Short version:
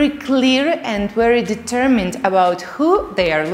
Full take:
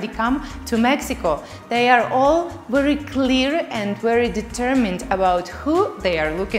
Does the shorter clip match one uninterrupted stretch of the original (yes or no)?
yes